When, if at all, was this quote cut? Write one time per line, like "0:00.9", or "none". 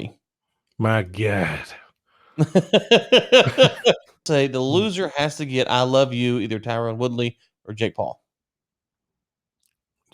0:04.3

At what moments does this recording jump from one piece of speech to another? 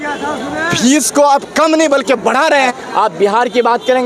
0:02.5

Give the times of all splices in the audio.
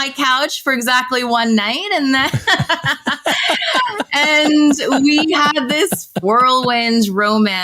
0:06.2

